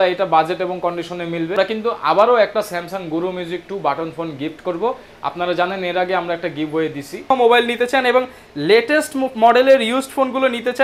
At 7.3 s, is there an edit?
yes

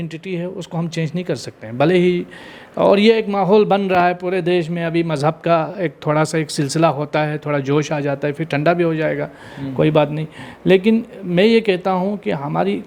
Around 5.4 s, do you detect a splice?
no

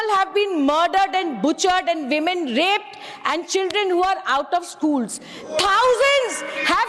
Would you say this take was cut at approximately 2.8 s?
no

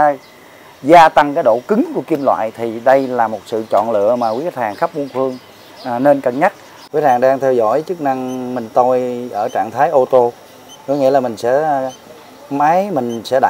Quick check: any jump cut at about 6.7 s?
yes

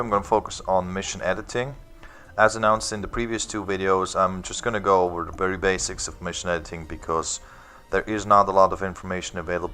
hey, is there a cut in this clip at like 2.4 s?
no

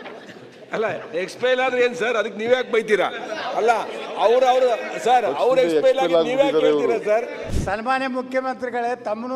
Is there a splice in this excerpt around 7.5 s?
yes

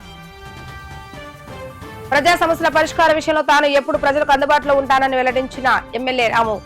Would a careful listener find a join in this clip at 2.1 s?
yes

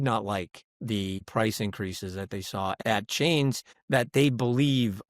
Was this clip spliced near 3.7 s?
yes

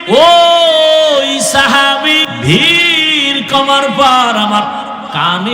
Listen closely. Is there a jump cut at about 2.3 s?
yes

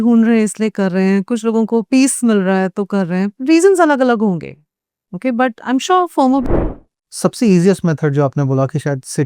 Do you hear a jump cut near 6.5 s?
yes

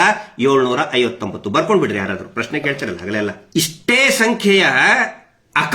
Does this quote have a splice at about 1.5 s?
no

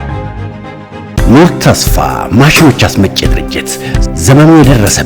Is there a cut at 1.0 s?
yes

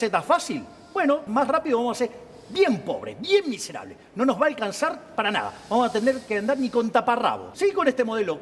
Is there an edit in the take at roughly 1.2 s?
yes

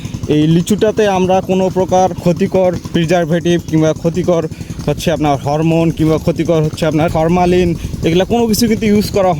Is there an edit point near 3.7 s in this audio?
no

